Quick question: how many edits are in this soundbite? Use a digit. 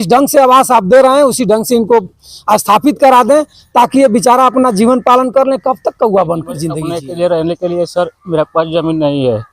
1